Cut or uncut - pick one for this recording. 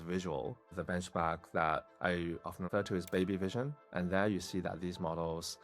cut